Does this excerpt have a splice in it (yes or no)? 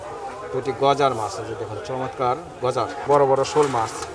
yes